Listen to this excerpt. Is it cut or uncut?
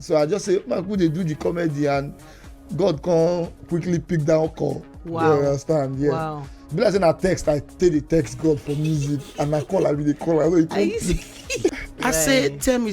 cut